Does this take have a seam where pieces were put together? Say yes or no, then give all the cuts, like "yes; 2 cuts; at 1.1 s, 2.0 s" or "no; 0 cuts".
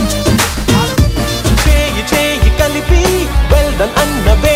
no; 0 cuts